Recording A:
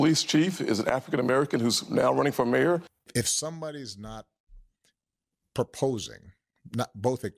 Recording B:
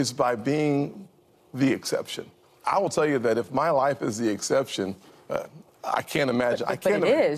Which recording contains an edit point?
A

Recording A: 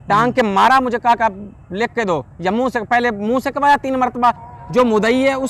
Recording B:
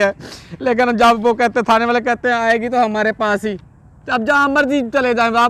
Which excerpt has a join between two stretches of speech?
A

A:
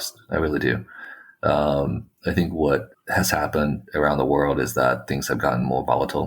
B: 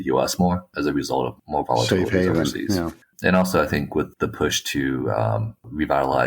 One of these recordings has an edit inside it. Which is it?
B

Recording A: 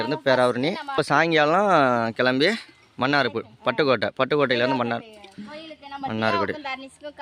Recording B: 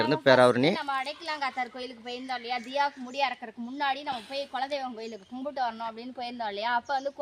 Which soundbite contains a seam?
A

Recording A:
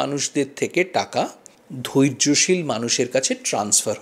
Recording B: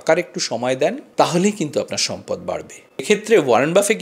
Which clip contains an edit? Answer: B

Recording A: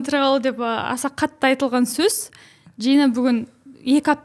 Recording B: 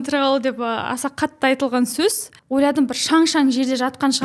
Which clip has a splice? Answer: B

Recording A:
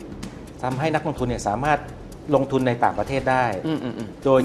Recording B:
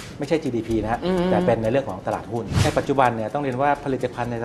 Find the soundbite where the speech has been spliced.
B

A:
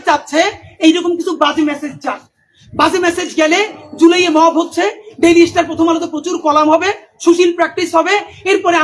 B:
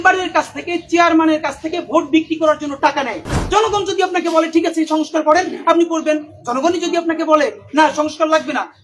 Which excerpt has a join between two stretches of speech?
B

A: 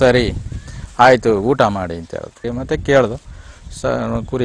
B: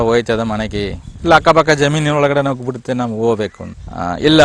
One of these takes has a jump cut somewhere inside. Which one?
A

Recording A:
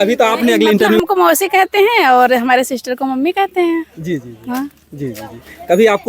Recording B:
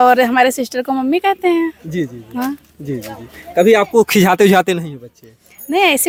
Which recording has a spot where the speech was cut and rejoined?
A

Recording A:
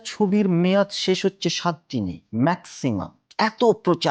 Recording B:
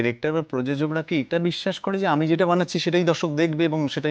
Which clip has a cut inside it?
A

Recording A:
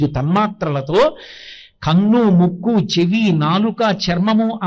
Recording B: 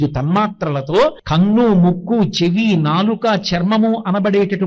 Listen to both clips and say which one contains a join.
B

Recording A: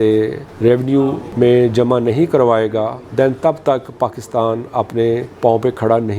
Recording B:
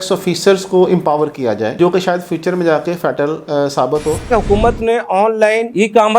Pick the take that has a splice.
B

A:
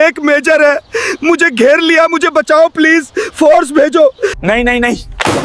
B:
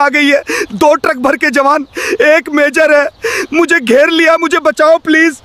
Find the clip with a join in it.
A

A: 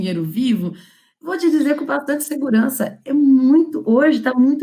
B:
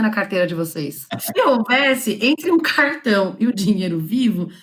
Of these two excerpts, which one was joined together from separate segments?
B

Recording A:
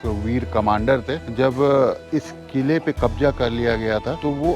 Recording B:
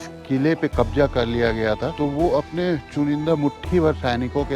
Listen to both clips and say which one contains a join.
A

